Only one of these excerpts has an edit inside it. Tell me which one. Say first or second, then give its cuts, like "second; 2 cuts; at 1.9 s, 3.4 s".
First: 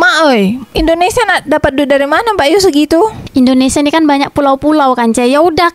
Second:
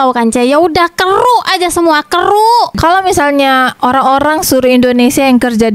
second; 1 cut; at 2.8 s